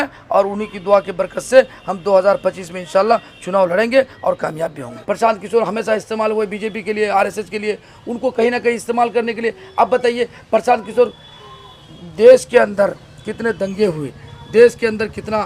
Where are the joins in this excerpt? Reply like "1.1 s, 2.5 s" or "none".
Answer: 5.0 s